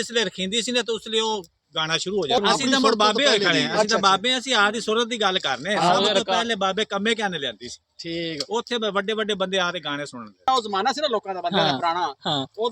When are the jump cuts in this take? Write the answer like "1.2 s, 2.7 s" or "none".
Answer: 2.4 s, 10.5 s